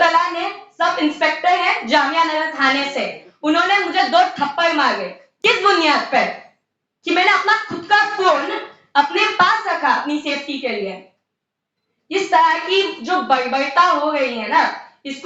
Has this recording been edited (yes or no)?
no